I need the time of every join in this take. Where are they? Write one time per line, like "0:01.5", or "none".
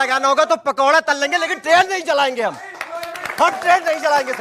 0:02.9